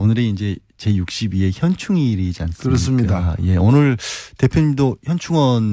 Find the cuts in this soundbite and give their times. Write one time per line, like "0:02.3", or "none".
0:02.6